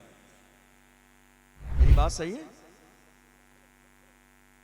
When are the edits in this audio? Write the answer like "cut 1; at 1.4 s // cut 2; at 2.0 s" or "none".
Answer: cut 1; at 1.8 s